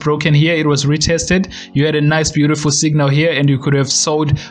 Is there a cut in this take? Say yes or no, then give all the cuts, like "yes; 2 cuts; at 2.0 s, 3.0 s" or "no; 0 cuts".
no; 0 cuts